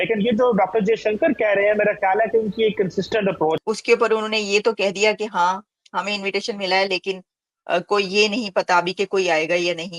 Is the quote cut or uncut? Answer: cut